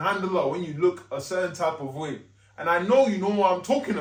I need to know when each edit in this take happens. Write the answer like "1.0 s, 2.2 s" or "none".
none